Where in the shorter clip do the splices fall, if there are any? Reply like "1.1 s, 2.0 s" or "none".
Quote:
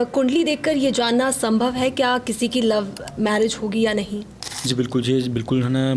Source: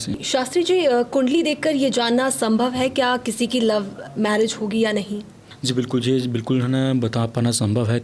none